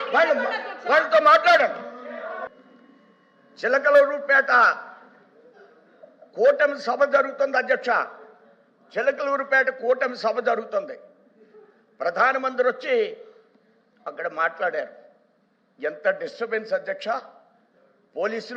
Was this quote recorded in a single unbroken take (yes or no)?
no